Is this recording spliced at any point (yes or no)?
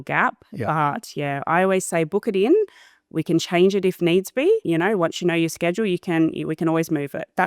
yes